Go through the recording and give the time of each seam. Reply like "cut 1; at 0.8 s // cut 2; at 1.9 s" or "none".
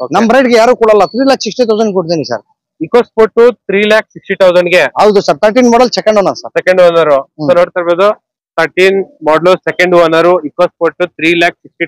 none